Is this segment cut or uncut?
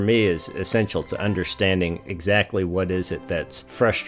uncut